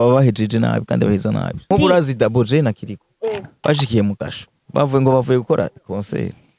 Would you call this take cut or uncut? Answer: cut